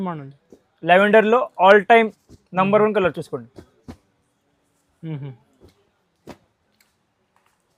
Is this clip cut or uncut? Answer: uncut